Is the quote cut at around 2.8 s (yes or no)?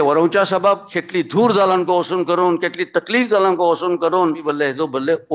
no